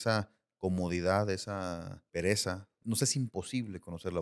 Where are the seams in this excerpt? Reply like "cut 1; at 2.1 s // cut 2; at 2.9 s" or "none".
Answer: cut 1; at 2.0 s // cut 2; at 2.8 s